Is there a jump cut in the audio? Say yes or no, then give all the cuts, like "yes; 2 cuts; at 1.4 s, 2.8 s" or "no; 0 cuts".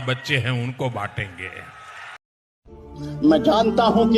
yes; 1 cut; at 2.3 s